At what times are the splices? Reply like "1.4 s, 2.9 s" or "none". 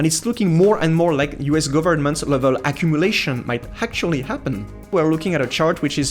4.9 s